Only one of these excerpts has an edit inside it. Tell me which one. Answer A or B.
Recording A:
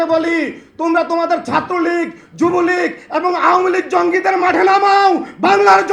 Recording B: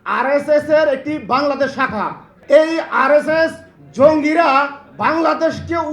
B